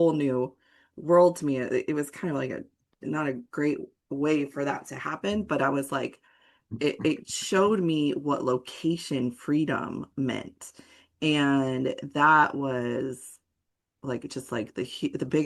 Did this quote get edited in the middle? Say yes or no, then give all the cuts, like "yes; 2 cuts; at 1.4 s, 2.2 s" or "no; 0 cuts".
no; 0 cuts